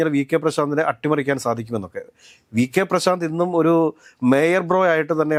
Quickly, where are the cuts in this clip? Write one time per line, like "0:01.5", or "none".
none